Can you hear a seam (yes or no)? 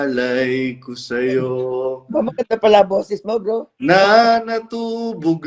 no